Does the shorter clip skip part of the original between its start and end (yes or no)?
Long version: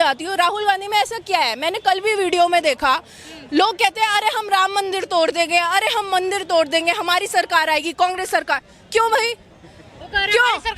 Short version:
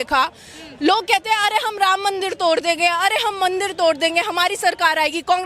no